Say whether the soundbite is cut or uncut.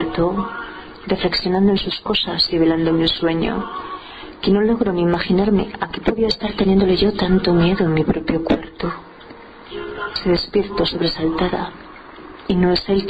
cut